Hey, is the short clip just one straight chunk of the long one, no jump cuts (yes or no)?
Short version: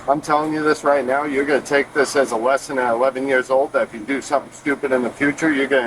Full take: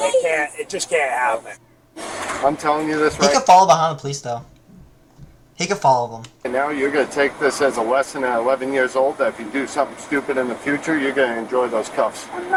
no